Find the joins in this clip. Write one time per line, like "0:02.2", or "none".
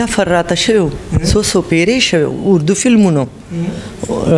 none